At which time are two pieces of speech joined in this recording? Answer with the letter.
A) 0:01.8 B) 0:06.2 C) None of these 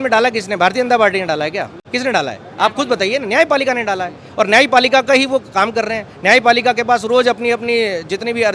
A